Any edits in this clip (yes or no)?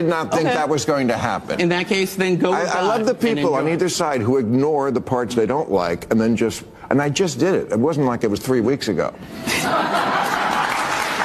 no